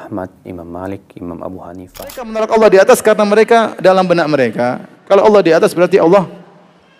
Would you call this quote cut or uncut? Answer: cut